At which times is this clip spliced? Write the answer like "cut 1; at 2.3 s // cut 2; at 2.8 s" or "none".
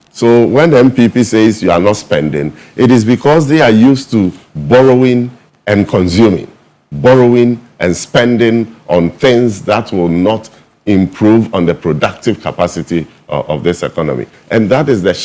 none